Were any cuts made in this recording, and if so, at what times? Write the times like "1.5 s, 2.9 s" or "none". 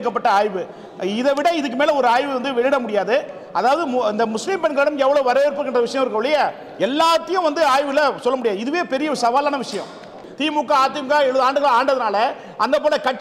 10.2 s